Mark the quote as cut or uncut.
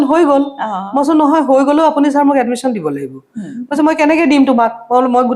uncut